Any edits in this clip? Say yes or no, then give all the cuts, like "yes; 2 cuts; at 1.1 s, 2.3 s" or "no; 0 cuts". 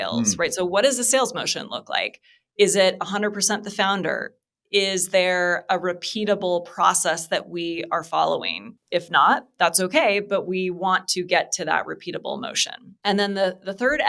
no; 0 cuts